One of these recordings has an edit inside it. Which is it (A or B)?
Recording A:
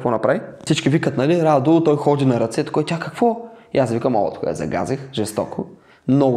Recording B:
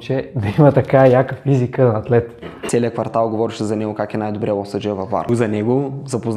B